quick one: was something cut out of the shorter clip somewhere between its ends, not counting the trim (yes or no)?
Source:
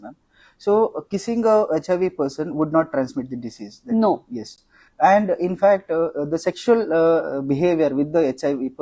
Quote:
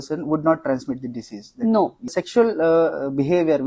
yes